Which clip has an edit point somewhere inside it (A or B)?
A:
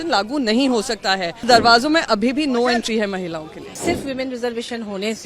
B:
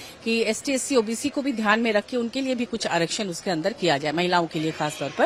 A